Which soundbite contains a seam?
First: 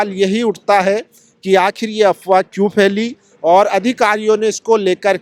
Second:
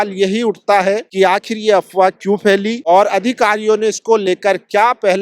second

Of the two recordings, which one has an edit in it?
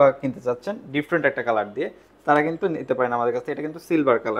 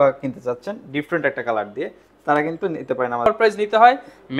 second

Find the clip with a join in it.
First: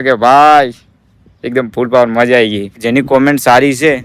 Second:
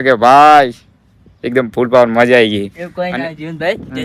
first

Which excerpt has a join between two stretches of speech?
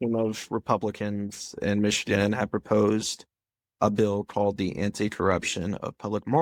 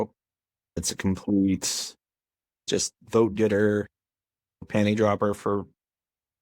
second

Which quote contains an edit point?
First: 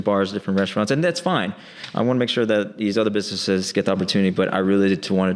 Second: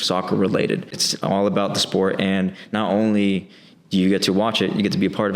second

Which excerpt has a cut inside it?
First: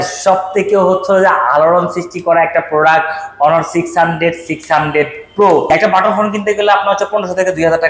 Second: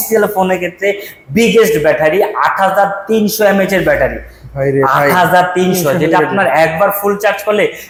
first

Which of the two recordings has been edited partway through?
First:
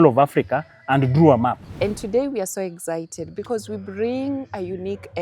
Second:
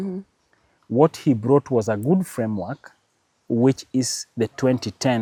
first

